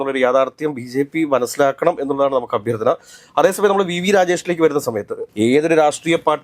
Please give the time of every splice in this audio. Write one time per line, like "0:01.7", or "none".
none